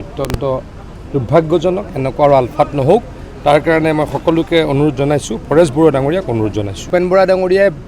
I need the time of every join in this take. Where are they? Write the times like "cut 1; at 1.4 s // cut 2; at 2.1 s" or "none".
cut 1; at 6.9 s